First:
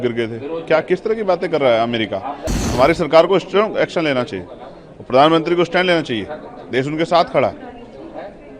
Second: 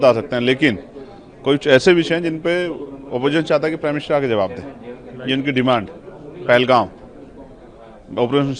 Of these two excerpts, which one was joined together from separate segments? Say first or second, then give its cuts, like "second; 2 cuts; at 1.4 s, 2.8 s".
first; 1 cut; at 2.6 s